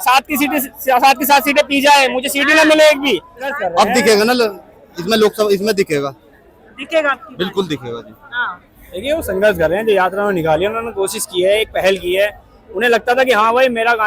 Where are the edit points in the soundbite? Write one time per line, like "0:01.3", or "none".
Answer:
0:03.6